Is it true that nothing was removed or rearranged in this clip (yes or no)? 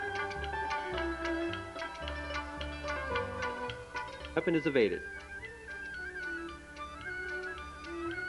yes